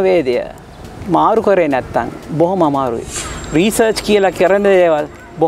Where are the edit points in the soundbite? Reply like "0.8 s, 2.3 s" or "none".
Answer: 3.0 s